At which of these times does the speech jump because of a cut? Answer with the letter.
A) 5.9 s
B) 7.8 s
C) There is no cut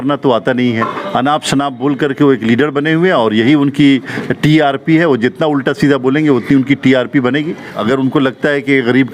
B